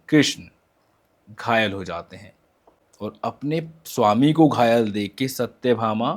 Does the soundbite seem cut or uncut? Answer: uncut